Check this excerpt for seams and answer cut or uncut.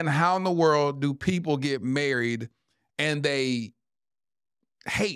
uncut